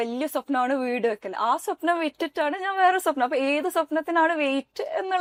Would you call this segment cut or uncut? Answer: uncut